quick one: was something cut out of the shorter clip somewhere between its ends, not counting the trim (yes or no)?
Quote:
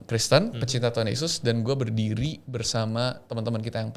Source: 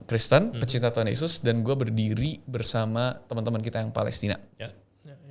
no